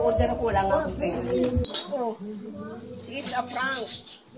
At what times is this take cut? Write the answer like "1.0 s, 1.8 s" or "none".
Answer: 1.7 s

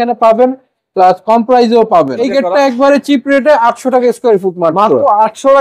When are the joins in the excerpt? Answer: 2.2 s

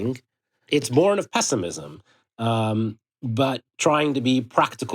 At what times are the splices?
0.9 s, 3.7 s

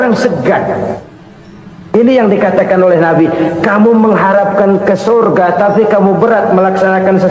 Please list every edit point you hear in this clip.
none

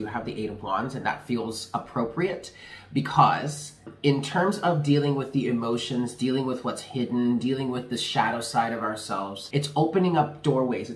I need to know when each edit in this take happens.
3.9 s, 9.4 s

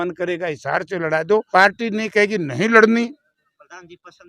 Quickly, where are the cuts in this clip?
1.5 s

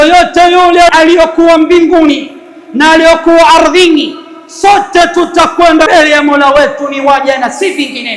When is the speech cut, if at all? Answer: 0.9 s, 5.9 s

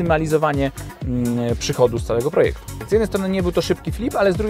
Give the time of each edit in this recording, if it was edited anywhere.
2.8 s

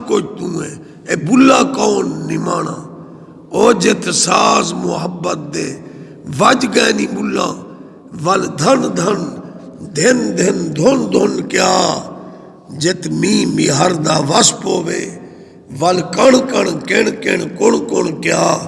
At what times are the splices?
4.1 s

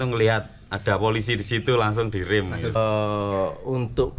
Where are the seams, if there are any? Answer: 2.7 s

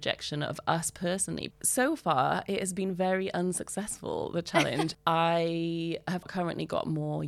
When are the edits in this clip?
1.5 s, 4.9 s, 6.3 s

